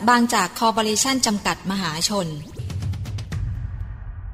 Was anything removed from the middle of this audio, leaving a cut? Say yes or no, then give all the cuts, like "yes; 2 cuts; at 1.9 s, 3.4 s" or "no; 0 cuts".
yes; 1 cut; at 2.6 s